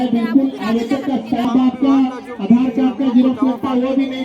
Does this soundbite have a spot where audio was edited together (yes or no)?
yes